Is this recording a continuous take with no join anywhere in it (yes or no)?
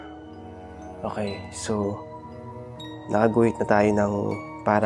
yes